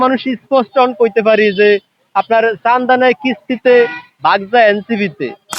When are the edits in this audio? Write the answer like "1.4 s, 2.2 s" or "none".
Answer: none